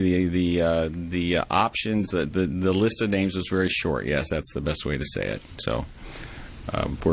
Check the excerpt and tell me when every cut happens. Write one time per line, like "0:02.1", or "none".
0:04.4